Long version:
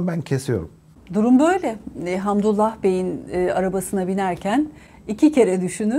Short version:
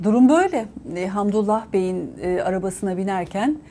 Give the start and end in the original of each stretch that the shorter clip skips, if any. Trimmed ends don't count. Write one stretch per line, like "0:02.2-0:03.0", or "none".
none